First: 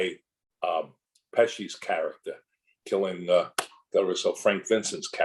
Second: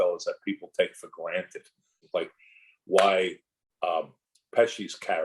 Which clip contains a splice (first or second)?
second